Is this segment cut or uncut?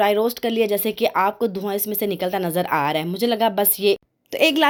uncut